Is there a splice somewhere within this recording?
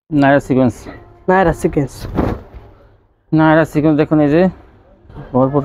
no; 0 cuts

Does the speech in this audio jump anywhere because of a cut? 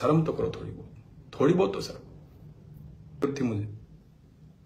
yes; 1 cut; at 3.2 s

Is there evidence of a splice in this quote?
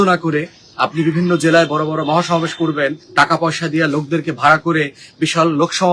yes; 1 cut; at 3.0 s

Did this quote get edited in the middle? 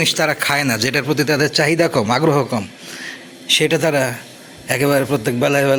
no; 0 cuts

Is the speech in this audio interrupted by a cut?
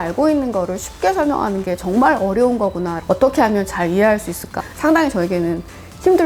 yes; 2 cuts; at 3.0 s, 4.6 s

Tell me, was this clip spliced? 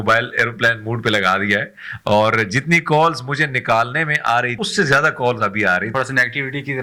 yes; 2 cuts; at 4.6 s, 5.9 s

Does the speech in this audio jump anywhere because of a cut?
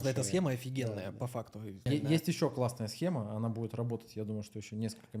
yes; 1 cut; at 1.8 s

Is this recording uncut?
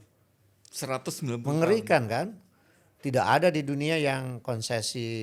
yes; 0 cuts

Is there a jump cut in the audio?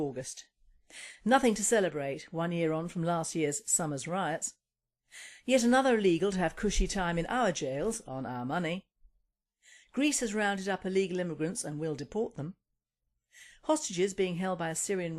yes; 1 cut; at 3.3 s

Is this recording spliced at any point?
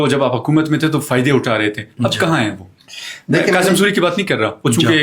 no; 0 cuts

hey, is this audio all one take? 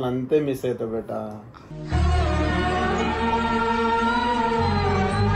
yes; 0 cuts

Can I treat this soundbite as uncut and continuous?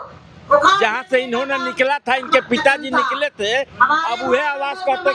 yes; 0 cuts

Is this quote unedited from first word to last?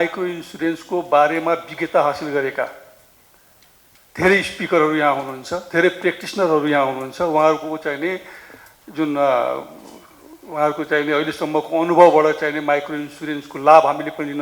yes; 0 cuts

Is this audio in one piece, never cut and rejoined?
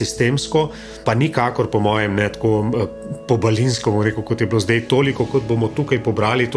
no; 1 cut; at 1.0 s

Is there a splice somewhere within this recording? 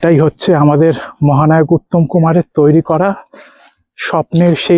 no; 0 cuts

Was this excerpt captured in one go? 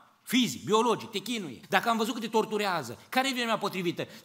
no; 1 cut; at 1.5 s

